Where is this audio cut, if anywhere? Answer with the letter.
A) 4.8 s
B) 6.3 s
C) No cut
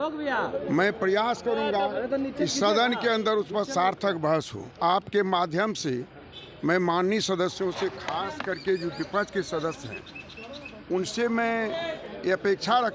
A